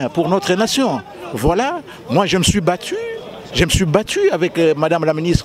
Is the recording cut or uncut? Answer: uncut